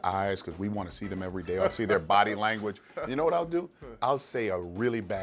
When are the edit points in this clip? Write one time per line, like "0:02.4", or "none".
none